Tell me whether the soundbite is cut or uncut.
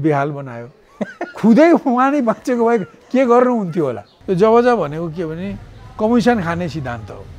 cut